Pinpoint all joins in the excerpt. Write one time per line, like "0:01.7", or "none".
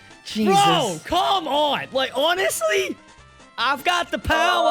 0:03.0

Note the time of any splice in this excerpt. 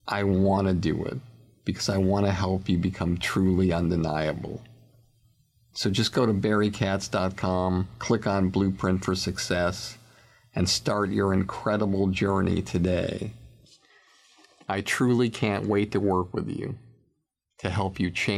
none

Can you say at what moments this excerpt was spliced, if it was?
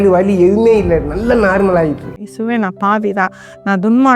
0:02.2

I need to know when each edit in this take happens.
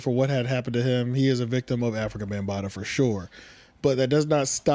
none

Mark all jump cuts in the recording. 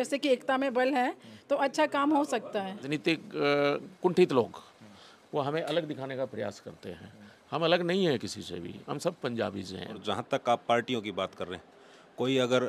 0:02.9
0:10.0

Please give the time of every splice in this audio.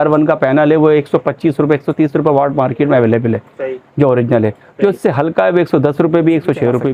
none

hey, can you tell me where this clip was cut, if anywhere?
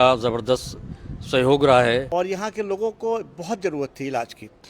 0:02.1

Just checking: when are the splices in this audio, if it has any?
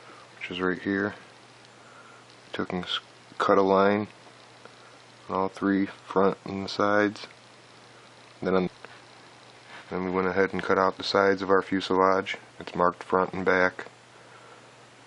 none

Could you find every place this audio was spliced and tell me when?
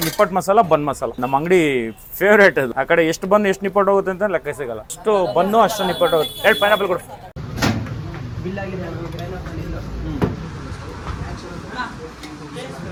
none

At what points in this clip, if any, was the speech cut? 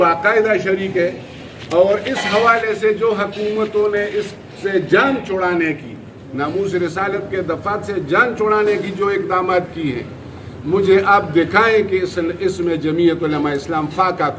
none

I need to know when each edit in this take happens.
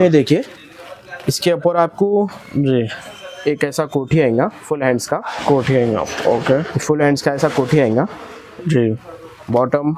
none

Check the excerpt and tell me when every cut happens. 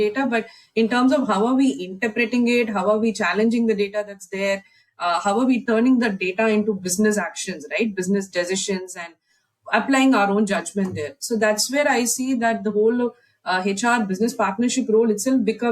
none

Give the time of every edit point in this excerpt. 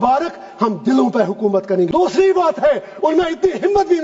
0:01.9

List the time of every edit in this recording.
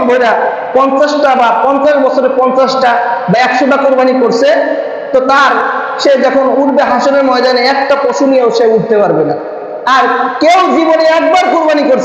none

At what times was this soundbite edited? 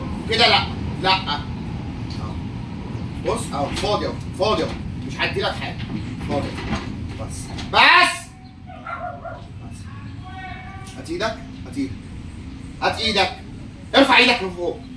none

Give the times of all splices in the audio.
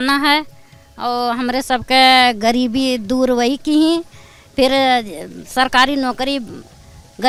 none

